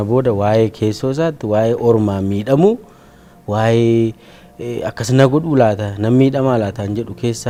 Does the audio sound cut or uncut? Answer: uncut